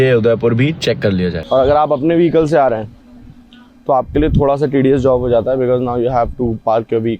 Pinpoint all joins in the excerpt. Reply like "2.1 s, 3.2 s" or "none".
1.4 s